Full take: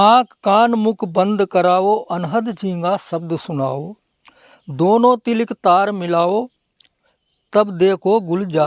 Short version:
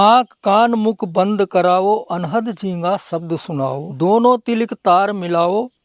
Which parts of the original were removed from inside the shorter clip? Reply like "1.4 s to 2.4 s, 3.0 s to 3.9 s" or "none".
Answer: 3.9 s to 4.7 s